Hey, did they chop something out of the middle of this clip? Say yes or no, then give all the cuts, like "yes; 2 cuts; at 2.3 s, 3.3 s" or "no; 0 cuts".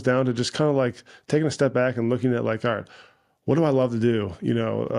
no; 0 cuts